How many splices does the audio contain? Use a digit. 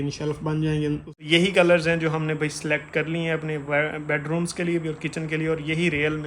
1